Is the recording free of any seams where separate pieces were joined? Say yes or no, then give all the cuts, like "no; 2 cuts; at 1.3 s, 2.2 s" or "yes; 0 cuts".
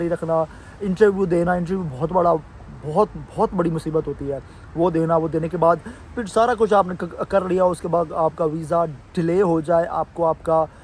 yes; 0 cuts